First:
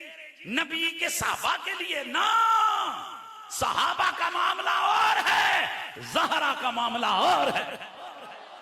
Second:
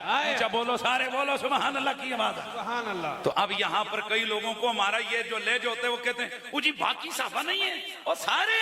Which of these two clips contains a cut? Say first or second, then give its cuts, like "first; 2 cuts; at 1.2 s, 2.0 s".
second; 1 cut; at 3.2 s